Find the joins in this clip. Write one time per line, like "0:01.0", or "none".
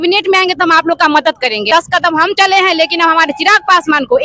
0:01.7